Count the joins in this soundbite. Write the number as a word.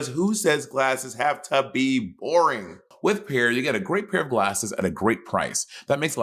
one